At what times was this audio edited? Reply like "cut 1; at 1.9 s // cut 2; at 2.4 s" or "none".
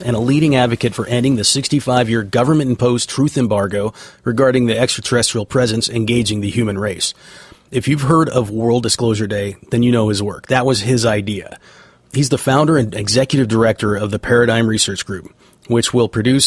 none